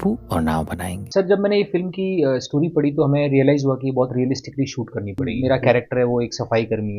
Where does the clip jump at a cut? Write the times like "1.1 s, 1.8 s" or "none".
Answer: 1.0 s, 5.3 s